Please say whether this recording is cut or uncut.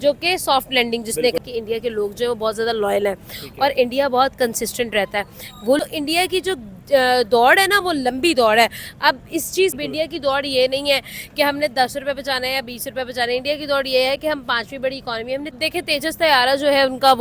cut